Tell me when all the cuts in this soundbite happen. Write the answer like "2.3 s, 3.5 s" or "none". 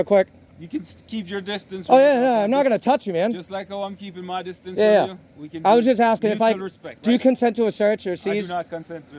none